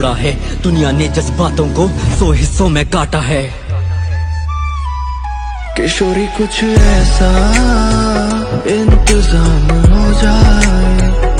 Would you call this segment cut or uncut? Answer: uncut